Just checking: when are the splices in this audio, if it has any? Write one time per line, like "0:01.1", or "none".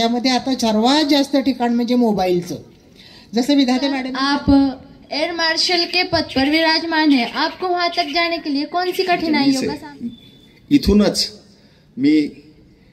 0:04.1
0:09.6